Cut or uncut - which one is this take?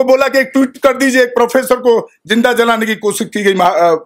uncut